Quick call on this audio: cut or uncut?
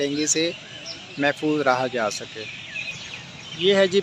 cut